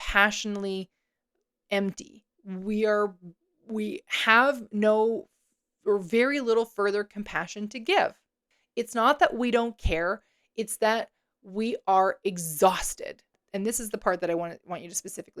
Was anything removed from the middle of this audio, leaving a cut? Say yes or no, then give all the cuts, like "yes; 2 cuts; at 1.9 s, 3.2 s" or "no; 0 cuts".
yes; 2 cuts; at 8.6 s, 13.4 s